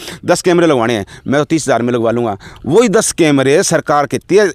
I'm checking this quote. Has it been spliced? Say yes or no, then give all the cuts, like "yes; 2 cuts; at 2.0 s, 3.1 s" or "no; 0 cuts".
no; 0 cuts